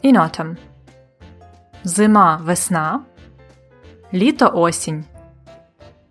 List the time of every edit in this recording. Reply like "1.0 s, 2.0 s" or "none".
none